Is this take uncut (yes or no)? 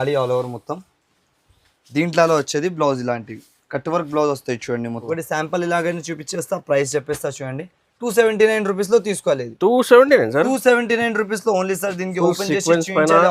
no